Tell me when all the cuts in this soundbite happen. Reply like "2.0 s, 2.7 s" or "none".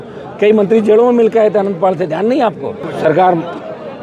2.9 s